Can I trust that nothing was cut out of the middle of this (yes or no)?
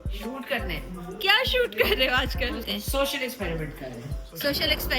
no